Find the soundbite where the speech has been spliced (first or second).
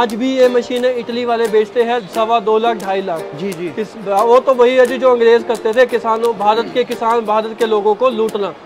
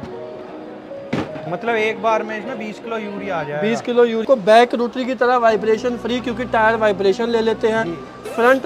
second